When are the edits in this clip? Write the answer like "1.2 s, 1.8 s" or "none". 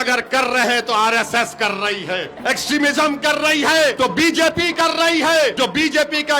2.3 s, 3.9 s, 5.5 s

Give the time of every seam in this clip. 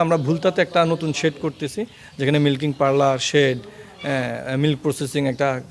none

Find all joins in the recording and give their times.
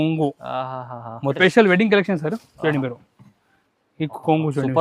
1.4 s

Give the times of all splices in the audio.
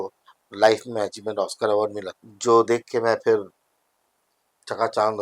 none

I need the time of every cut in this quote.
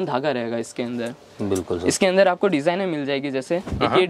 none

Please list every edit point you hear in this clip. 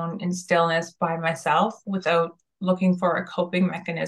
none

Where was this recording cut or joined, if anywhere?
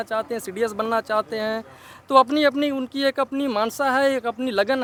none

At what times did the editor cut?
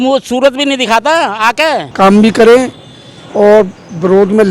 1.9 s

